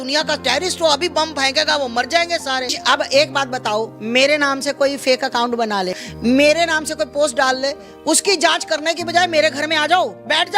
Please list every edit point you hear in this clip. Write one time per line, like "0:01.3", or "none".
0:02.8
0:06.0